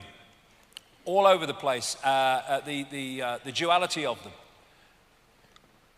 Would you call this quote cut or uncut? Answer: cut